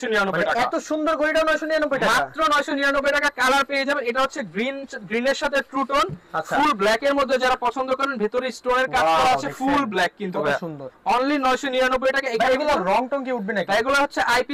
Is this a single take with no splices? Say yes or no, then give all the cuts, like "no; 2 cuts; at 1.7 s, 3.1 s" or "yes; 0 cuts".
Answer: yes; 0 cuts